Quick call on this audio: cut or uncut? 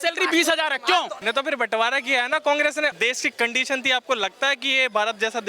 cut